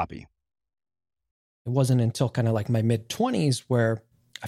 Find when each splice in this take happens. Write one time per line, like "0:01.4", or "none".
0:01.7